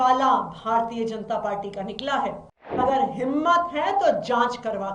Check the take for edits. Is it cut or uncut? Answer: cut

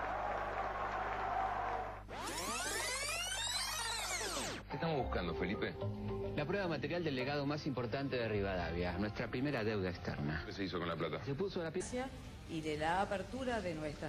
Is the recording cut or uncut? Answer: uncut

